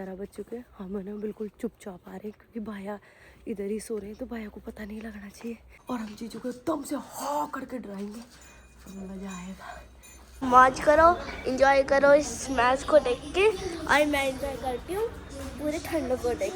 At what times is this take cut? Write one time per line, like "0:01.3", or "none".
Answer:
0:05.7
0:10.4